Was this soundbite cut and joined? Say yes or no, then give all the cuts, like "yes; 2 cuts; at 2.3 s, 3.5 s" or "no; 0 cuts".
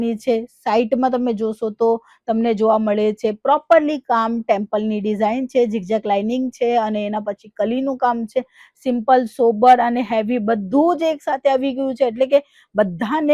no; 0 cuts